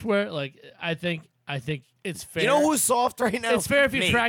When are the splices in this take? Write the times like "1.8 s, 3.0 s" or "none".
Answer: 1.9 s